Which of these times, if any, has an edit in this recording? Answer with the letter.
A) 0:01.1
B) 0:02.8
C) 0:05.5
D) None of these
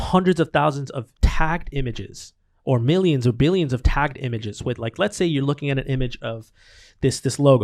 A